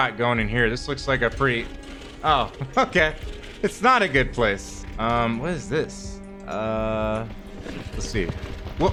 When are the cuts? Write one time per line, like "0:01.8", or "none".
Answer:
none